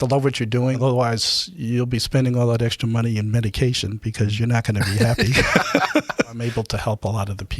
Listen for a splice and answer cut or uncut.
cut